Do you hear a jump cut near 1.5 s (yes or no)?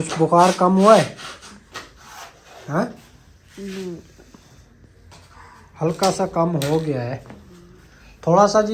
no